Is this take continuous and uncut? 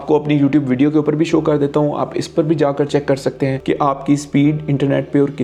yes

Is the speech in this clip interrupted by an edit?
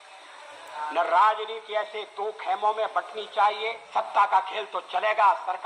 yes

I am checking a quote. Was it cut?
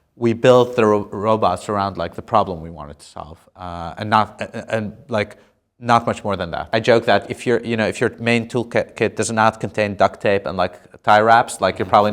yes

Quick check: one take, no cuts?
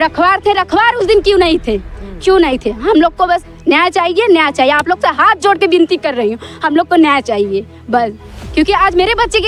yes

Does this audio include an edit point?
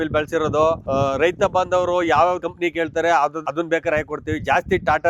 no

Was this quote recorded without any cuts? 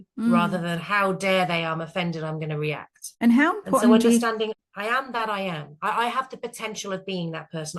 no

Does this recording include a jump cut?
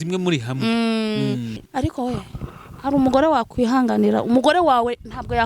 yes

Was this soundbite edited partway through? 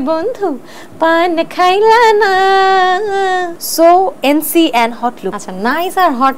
yes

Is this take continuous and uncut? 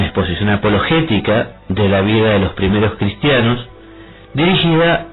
no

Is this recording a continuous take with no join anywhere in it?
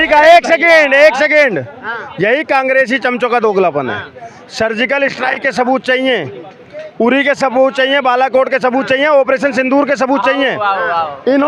yes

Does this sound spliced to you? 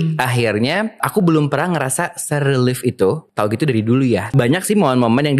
yes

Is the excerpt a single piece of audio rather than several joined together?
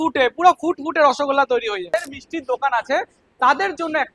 no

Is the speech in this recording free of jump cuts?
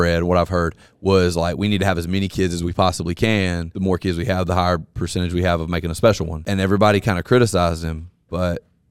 no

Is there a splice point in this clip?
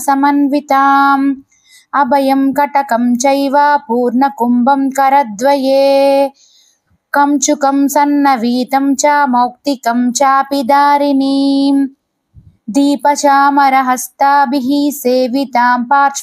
no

